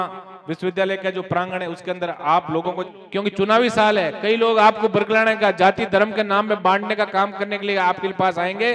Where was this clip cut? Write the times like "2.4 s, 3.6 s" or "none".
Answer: 2.8 s